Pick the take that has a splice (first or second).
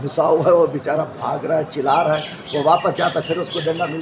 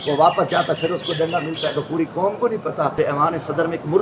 second